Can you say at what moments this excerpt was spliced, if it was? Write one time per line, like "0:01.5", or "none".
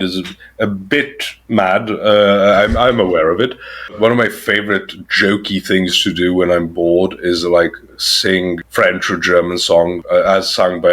0:04.0
0:08.6
0:10.0